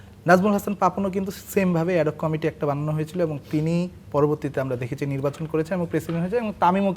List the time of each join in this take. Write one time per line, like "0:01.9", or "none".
none